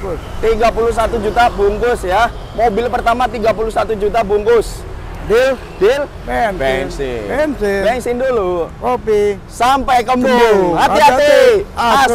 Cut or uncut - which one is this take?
uncut